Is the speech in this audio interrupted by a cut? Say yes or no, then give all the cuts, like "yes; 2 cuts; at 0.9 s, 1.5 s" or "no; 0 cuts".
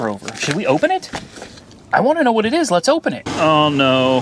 yes; 1 cut; at 3.2 s